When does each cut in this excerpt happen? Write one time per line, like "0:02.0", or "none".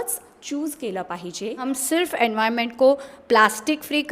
0:01.6